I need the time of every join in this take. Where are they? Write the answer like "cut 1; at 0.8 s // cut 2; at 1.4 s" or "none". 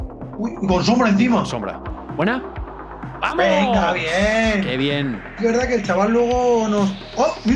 cut 1; at 1.9 s // cut 2; at 5.4 s